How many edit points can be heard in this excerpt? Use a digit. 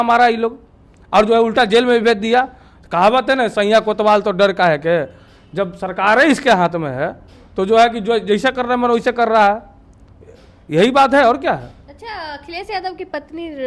0